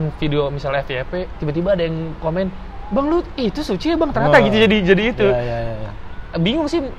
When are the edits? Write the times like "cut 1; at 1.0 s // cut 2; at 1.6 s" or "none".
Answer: none